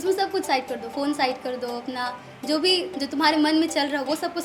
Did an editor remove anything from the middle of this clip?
no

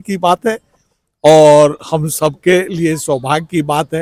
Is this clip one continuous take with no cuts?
yes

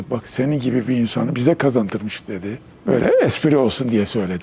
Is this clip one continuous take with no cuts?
yes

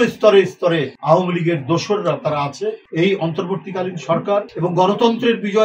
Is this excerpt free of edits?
no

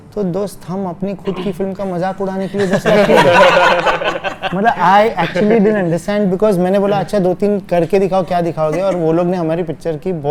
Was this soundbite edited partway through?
no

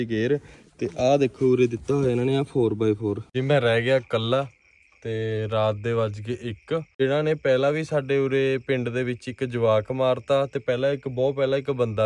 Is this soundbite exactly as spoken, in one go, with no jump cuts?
no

